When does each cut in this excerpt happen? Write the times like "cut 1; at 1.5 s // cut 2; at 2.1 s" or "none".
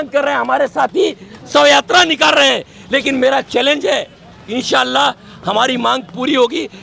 none